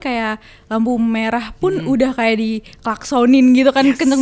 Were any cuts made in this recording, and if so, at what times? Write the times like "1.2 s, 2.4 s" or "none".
none